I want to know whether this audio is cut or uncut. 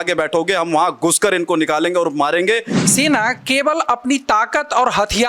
cut